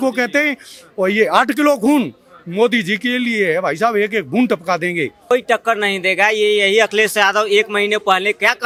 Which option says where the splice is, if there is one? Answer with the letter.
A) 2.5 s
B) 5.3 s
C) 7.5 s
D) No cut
D